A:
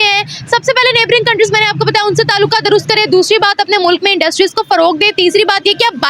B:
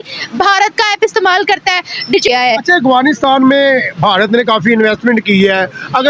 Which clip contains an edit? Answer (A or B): B